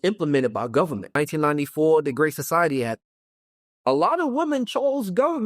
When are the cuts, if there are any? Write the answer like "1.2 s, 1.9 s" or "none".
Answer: 1.1 s